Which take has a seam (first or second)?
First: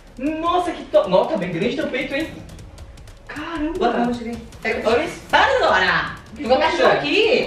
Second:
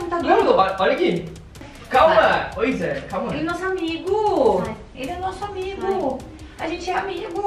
second